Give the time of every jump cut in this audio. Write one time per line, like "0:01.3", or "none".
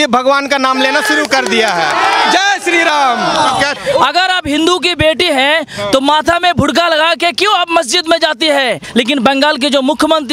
0:03.8
0:08.8